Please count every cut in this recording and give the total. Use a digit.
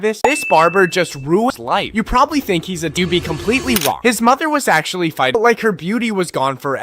3